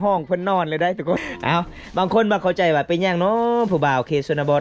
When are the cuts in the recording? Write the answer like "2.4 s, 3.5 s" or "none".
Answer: 1.2 s